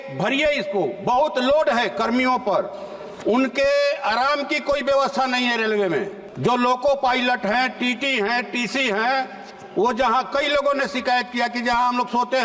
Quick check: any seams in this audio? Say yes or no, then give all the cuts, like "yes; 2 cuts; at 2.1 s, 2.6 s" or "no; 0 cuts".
yes; 1 cut; at 6.2 s